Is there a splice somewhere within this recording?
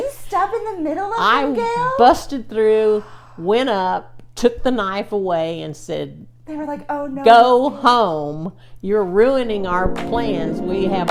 no; 0 cuts

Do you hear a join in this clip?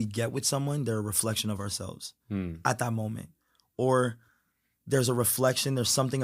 no; 0 cuts

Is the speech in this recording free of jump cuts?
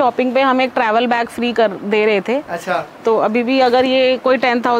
yes; 0 cuts

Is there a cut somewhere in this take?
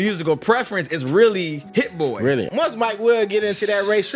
yes; 2 cuts; at 1.6 s, 2.5 s

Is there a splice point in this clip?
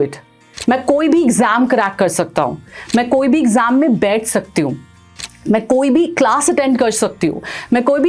no; 0 cuts

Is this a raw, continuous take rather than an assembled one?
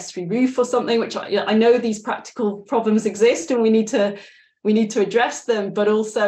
yes; 0 cuts

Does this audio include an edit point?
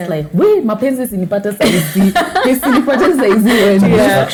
no; 0 cuts

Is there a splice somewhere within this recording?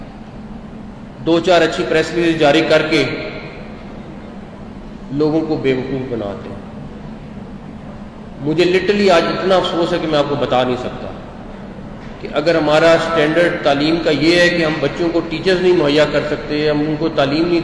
no; 0 cuts

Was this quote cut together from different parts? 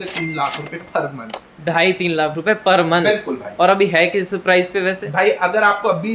no; 0 cuts

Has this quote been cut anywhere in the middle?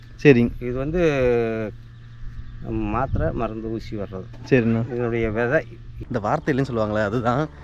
yes; 1 cut; at 5.9 s

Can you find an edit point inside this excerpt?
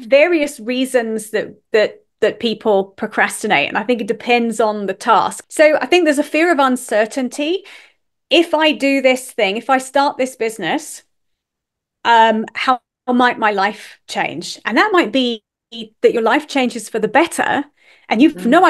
yes; 1 cut; at 5.4 s

